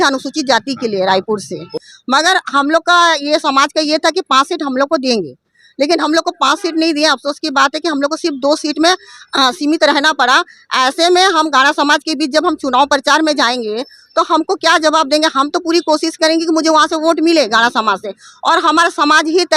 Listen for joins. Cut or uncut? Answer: cut